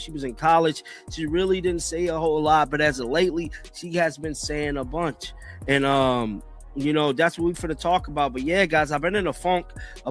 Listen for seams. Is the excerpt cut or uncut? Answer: cut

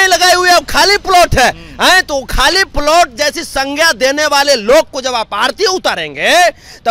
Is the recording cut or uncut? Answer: uncut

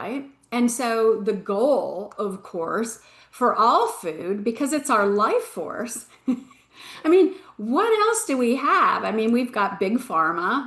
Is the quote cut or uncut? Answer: uncut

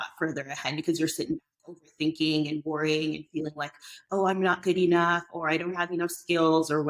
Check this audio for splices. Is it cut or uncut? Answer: uncut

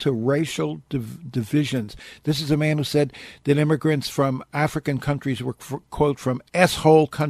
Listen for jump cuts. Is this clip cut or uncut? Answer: uncut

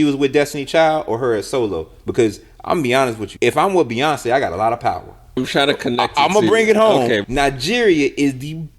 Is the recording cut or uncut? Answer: cut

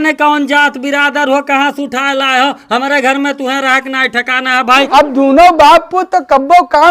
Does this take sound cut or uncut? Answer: cut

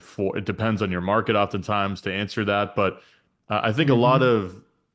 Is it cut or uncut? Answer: uncut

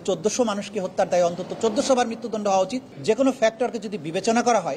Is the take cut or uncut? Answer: cut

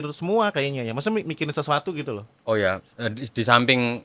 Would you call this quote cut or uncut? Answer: uncut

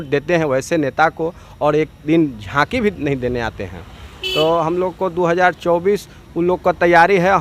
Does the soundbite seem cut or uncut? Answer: uncut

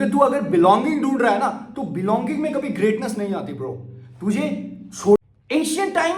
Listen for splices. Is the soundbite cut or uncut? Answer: cut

